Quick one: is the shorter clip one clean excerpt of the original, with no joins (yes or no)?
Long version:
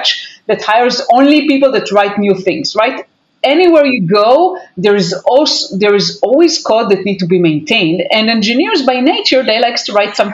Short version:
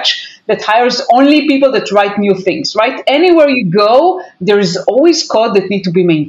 no